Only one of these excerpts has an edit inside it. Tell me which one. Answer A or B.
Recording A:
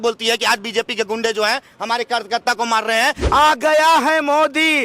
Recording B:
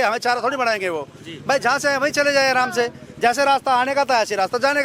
A